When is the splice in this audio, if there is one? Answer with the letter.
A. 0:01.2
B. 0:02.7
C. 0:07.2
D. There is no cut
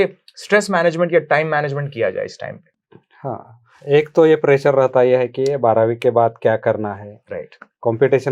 D